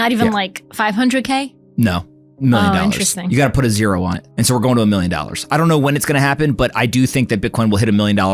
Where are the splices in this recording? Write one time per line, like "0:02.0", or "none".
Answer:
0:04.2